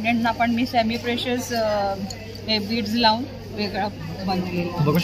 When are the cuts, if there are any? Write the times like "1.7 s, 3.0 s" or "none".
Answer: none